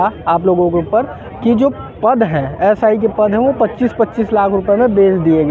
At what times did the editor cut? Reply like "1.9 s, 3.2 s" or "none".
none